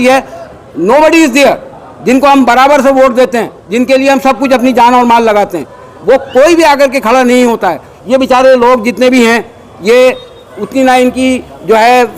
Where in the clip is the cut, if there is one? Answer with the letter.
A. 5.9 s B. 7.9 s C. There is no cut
C